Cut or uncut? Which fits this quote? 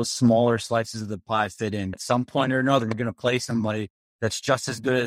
cut